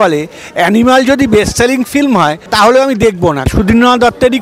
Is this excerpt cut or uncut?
cut